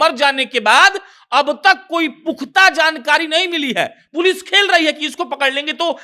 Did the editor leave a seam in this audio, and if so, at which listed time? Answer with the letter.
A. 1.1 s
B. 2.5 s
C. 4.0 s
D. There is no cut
D